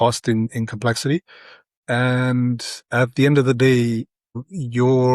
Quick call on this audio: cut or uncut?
cut